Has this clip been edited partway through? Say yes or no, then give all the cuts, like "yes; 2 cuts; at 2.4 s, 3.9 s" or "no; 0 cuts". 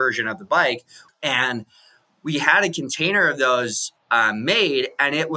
yes; 1 cut; at 0.9 s